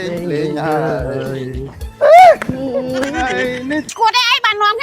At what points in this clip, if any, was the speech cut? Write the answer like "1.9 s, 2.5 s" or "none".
3.9 s

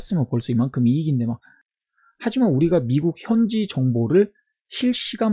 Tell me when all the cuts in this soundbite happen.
1.5 s

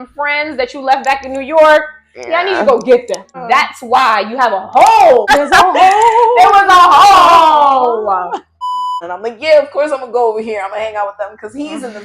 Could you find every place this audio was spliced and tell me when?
3.3 s, 5.3 s, 8.7 s

